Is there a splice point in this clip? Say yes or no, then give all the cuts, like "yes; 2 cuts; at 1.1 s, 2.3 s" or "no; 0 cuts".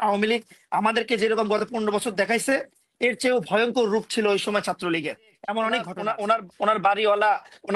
yes; 1 cut; at 5.9 s